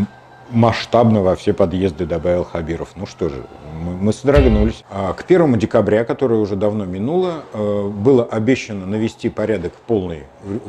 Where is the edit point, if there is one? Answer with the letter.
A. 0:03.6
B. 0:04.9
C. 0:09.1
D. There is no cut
B